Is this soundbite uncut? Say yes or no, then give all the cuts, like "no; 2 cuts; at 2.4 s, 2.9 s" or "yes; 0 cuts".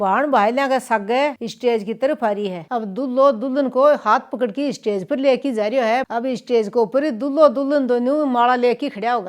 no; 2 cuts; at 2.6 s, 6.1 s